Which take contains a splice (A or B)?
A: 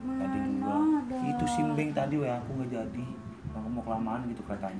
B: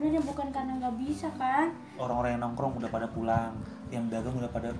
B